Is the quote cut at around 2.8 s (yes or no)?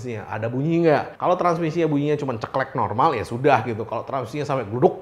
no